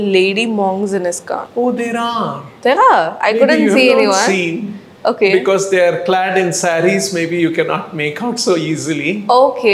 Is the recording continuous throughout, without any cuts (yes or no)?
no